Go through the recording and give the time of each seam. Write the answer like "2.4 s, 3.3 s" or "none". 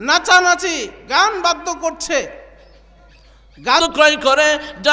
3.8 s

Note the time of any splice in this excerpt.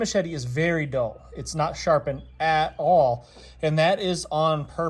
none

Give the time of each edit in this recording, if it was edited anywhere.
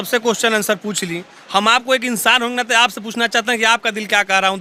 none

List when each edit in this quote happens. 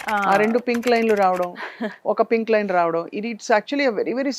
none

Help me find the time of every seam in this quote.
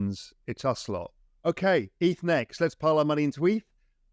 1.3 s

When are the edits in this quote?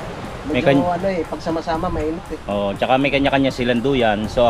none

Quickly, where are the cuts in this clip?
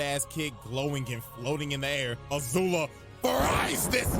1.2 s

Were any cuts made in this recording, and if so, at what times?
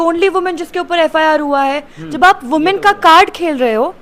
none

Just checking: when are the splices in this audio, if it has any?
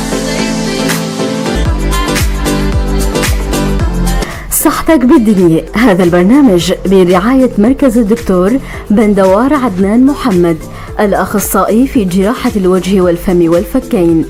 none

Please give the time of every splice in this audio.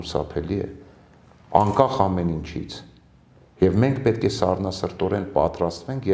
none

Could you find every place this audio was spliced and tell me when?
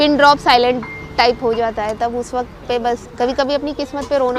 3.1 s

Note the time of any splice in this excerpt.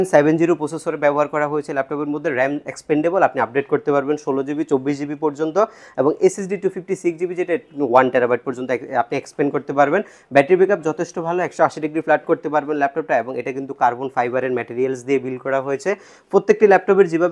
none

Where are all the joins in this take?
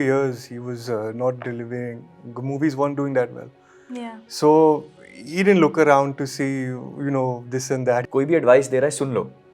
8.1 s

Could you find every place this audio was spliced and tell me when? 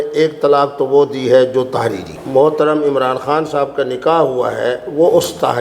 2.1 s

